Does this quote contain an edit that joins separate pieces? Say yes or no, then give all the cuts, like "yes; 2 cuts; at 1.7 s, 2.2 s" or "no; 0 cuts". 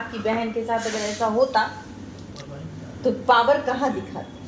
no; 0 cuts